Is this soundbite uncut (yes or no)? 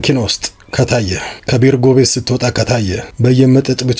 no